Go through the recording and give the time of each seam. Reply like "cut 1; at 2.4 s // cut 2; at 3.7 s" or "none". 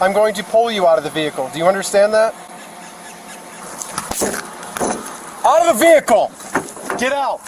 cut 1; at 3.6 s // cut 2; at 6.4 s